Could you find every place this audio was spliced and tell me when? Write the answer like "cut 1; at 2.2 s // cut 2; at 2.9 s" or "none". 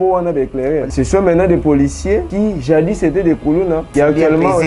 cut 1; at 0.9 s // cut 2; at 2.3 s // cut 3; at 3.9 s